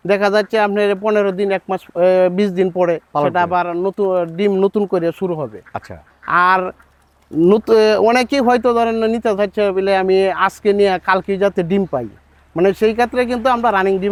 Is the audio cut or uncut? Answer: uncut